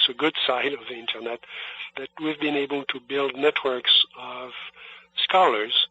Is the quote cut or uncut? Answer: cut